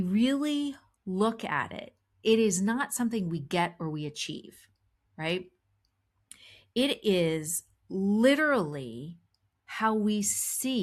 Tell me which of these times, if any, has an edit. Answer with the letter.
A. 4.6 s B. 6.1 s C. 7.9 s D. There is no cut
D